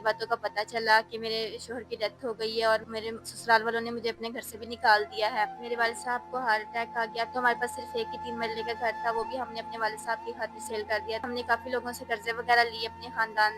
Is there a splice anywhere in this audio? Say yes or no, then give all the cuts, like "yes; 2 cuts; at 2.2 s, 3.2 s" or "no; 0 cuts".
yes; 2 cuts; at 7.3 s, 11.2 s